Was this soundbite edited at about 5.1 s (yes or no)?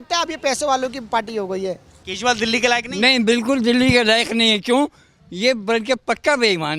no